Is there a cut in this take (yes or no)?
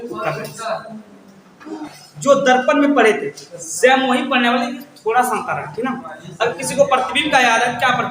yes